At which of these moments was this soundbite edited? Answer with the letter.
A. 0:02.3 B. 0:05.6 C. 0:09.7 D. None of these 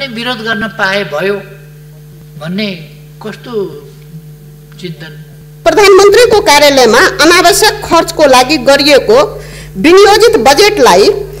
B